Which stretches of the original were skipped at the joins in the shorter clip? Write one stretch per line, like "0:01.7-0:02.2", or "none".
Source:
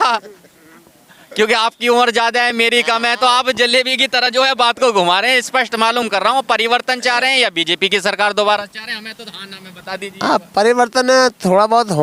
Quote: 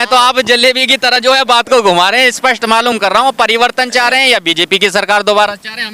none